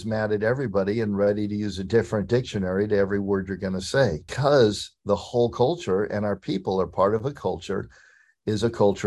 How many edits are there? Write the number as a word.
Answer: one